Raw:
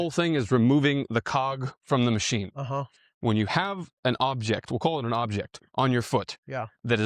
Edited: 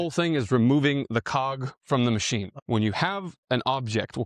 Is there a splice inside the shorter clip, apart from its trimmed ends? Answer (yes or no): yes